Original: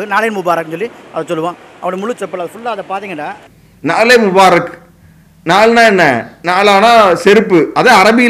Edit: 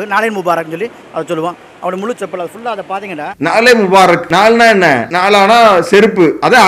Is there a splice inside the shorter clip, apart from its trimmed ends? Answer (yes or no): yes